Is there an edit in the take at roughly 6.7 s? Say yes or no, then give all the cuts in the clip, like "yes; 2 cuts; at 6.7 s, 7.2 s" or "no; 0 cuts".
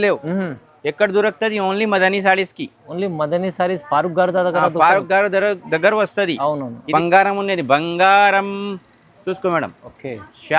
yes; 1 cut; at 6.7 s